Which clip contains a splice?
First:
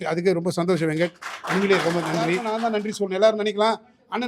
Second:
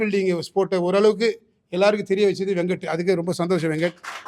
first; 1 cut; at 2.5 s

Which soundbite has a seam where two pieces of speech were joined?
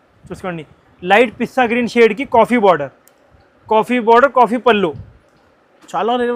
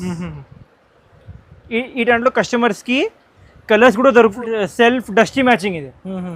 second; 1 cut; at 4.2 s

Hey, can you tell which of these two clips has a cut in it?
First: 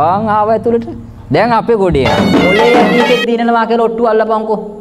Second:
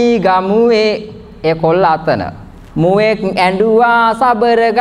first; 1 cut; at 2.3 s

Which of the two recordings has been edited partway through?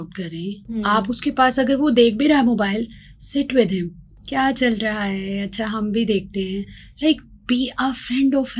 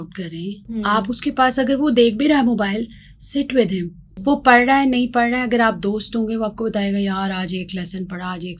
second; 1 cut; at 4.1 s

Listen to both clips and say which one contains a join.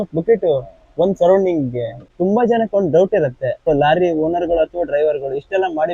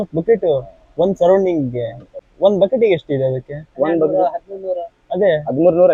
first; 2 cuts; at 2.1 s, 3.7 s

